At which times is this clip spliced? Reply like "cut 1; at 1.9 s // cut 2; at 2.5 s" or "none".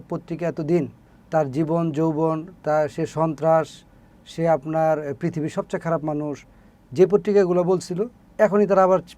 none